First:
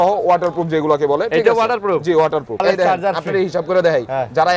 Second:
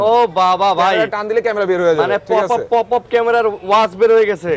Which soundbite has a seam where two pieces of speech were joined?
first; 1 cut; at 2.6 s

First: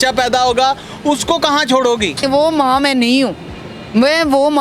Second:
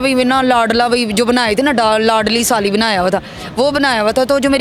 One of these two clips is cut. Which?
first; 1 cut; at 2.2 s

